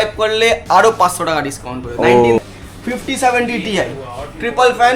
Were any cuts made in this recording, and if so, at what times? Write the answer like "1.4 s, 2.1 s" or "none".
2.4 s